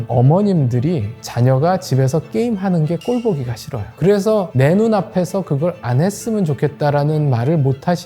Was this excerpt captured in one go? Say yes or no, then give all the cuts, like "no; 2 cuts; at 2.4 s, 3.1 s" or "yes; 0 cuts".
no; 2 cuts; at 1.2 s, 4.0 s